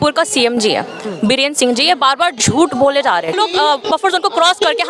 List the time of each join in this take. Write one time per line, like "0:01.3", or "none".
0:03.3